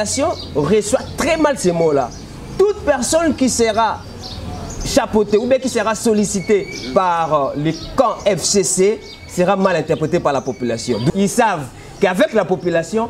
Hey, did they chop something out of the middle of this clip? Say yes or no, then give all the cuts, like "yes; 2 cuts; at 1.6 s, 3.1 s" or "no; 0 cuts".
yes; 1 cut; at 11.1 s